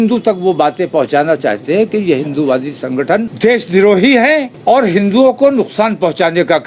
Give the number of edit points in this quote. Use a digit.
2